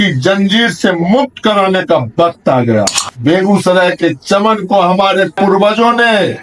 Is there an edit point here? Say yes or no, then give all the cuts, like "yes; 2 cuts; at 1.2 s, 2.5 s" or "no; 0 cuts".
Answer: yes; 1 cut; at 3.1 s